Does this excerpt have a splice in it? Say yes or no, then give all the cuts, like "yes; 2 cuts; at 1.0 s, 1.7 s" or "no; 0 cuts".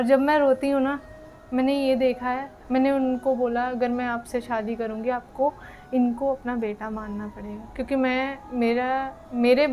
yes; 1 cut; at 2.5 s